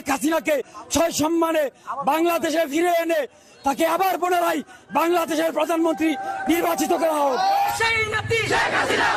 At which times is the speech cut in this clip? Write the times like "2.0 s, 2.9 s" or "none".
none